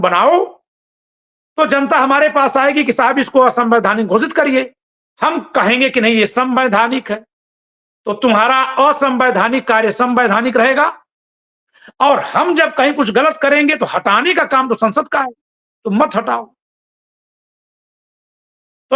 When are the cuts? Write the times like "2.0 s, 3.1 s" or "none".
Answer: none